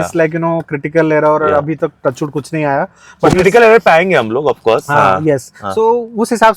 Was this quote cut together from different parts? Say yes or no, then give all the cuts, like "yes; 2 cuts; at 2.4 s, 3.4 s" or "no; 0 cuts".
no; 0 cuts